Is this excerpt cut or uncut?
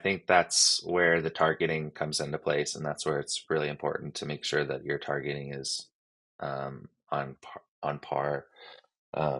uncut